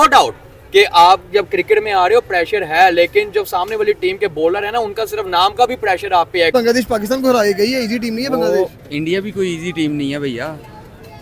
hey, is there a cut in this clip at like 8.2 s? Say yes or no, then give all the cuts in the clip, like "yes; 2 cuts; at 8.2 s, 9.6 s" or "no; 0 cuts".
no; 1 cut; at 6.5 s